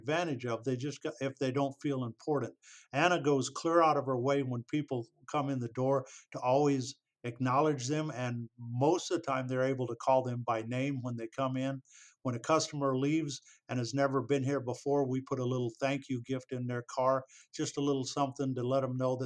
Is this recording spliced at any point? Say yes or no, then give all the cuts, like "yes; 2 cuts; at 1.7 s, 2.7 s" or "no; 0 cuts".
no; 0 cuts